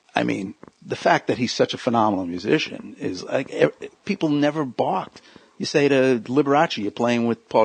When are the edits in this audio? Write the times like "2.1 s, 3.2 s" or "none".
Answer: none